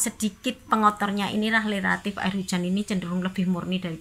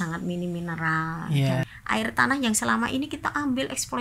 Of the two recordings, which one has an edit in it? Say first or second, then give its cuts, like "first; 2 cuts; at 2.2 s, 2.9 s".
second; 1 cut; at 1.7 s